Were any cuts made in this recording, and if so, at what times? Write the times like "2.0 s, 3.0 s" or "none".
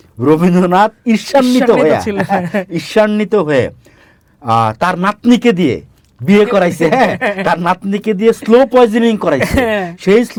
none